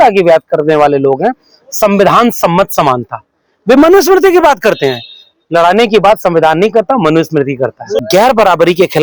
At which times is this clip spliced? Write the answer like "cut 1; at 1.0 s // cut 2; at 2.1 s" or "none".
cut 1; at 8.0 s